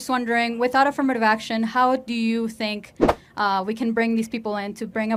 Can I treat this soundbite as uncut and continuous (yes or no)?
yes